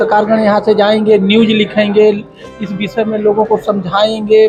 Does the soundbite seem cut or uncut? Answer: uncut